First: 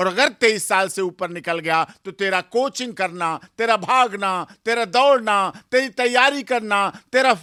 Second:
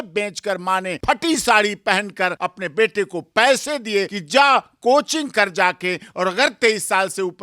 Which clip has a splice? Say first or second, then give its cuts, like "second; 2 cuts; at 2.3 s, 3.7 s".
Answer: second; 3 cuts; at 0.9 s, 2.4 s, 4.2 s